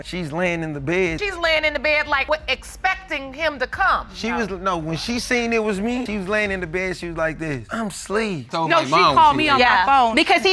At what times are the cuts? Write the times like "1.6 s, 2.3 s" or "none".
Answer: 8.5 s